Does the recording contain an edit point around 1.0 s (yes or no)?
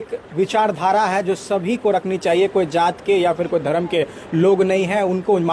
no